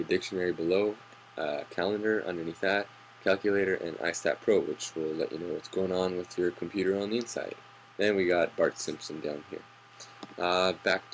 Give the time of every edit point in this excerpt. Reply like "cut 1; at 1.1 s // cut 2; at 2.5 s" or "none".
cut 1; at 9.5 s